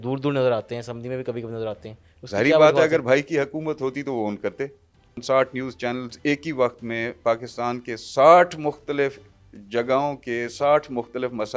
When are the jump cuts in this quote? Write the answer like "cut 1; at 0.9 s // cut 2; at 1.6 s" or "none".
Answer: cut 1; at 5.2 s